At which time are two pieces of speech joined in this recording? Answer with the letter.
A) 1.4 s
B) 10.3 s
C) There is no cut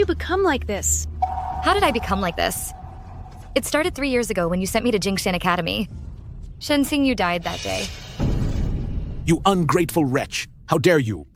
C